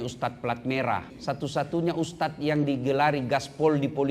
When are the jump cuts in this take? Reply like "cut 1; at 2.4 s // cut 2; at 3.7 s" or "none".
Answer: cut 1; at 1.1 s